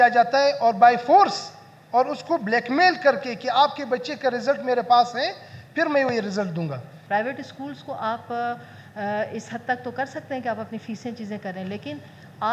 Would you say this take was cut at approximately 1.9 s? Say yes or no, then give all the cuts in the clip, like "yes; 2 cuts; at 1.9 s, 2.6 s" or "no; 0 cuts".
no; 1 cut; at 6.9 s